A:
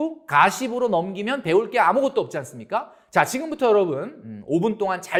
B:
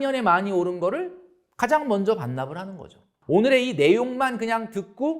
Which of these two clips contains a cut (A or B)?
B